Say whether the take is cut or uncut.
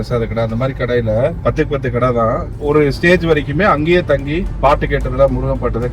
cut